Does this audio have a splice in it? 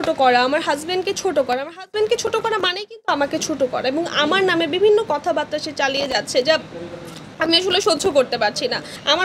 no; 0 cuts

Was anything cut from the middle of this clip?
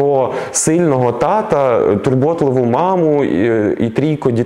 no; 0 cuts

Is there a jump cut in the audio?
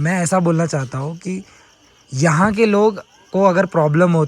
no; 0 cuts

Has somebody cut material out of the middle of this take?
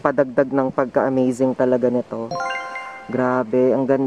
no; 0 cuts

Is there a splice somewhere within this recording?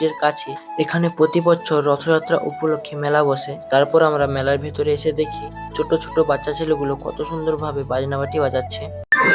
no; 0 cuts

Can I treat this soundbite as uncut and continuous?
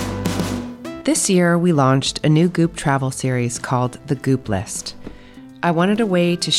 no; 1 cut; at 1.0 s

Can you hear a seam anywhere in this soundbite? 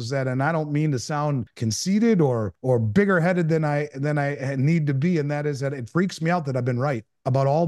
yes; 2 cuts; at 1.5 s, 2.5 s

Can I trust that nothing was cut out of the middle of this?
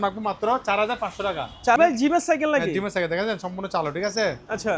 no; 1 cut; at 1.8 s

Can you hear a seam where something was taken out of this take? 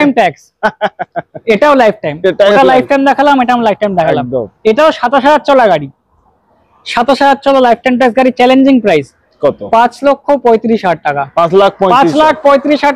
no; 0 cuts

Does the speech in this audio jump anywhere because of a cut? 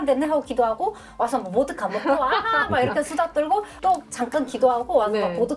yes; 1 cut; at 3.8 s

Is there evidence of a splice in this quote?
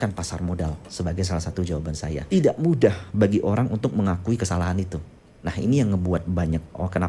yes; 1 cut; at 2.2 s

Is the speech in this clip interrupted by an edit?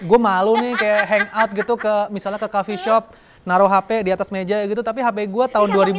no; 0 cuts

